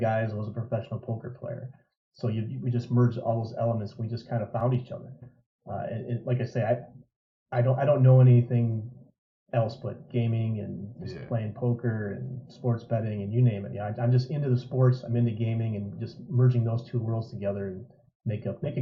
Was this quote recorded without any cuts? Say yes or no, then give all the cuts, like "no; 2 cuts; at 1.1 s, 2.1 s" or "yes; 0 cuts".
yes; 0 cuts